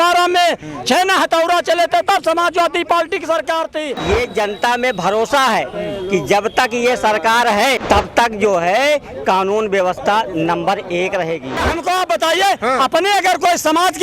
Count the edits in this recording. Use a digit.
3